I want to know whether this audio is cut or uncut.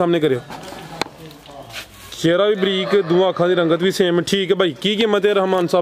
uncut